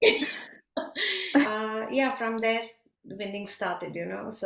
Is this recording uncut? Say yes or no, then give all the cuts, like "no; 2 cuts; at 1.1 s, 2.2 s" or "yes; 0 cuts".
no; 1 cut; at 1.5 s